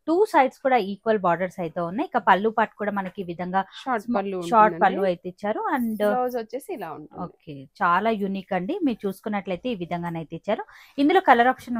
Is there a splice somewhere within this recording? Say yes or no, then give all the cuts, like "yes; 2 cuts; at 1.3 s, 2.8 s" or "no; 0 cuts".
no; 0 cuts